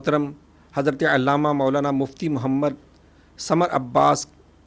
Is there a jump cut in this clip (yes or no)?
no